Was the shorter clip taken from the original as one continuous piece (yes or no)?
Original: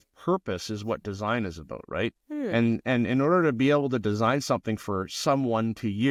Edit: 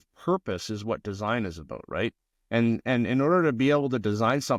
yes